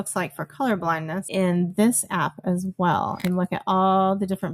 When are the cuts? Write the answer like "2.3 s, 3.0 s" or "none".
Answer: 1.2 s, 3.2 s